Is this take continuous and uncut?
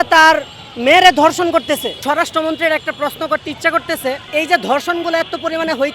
no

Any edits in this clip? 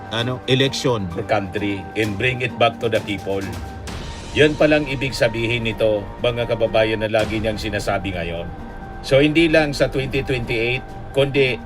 yes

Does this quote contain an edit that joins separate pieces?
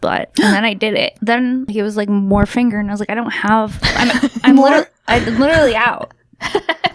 yes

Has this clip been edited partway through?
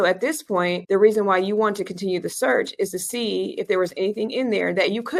no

